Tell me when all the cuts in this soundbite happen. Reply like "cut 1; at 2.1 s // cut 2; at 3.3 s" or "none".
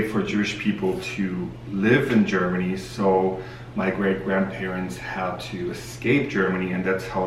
none